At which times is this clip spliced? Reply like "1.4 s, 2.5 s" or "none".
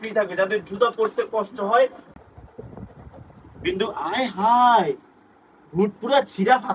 2.0 s

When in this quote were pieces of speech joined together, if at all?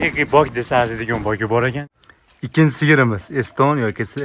1.8 s

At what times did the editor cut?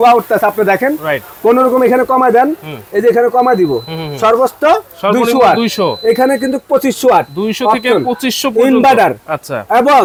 none

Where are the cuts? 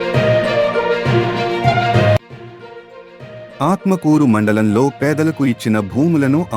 2.2 s

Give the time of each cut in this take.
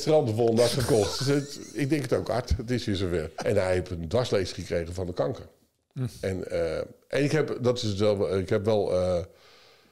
3.3 s

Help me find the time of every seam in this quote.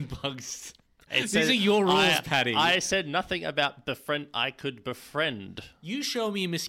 1.0 s

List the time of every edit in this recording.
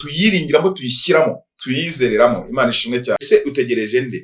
3.2 s

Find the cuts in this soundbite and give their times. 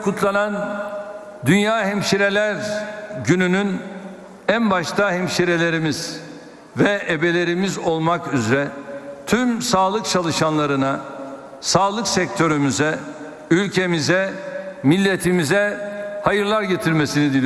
none

